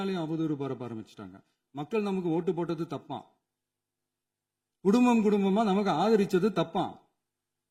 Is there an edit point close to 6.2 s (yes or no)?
no